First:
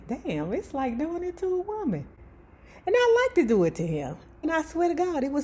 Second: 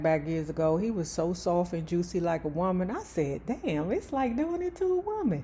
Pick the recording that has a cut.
first; 1 cut; at 4.5 s

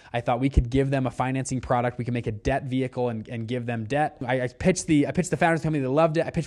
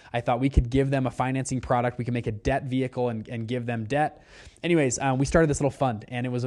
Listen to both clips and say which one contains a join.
first; 1 cut; at 4.2 s

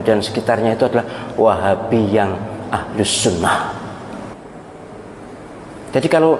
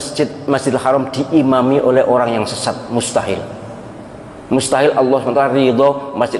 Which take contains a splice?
first; 1 cut; at 4.3 s

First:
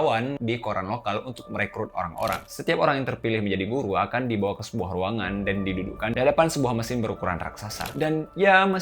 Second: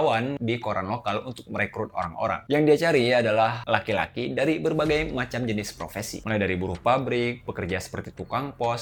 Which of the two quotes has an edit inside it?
first; 2 cuts; at 2.4 s, 7.9 s

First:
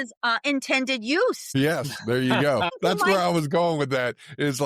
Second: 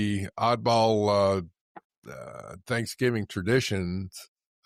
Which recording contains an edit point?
first; 2 cuts; at 1.4 s, 2.7 s

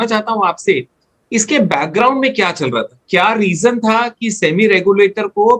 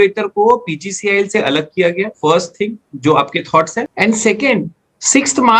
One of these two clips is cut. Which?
second; 2 cuts; at 2.1 s, 3.9 s

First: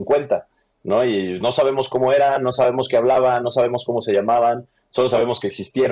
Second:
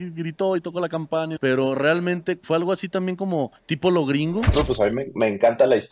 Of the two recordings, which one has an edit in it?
second; 4 cuts; at 1.3 s, 2.4 s, 3.6 s, 4.5 s

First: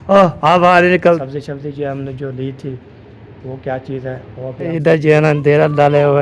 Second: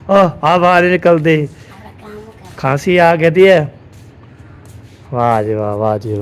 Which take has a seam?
first; 2 cuts; at 1.2 s, 4.7 s

